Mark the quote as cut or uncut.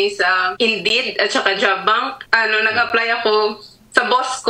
cut